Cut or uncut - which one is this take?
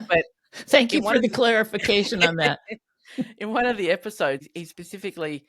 cut